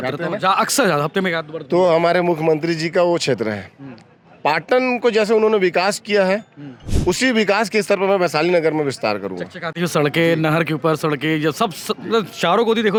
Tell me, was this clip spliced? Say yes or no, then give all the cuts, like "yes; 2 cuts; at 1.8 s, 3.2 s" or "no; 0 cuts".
no; 0 cuts